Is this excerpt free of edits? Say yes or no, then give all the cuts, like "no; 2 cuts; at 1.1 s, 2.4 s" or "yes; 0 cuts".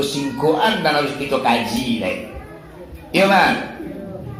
yes; 0 cuts